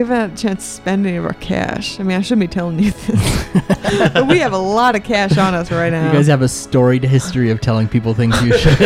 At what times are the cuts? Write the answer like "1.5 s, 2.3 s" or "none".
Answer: none